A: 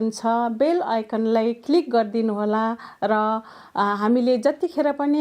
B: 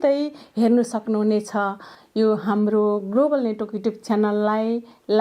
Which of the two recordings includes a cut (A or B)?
B